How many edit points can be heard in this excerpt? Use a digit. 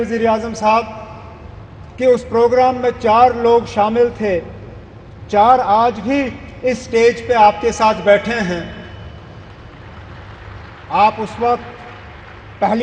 0